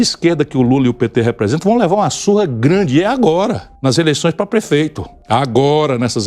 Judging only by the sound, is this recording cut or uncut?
cut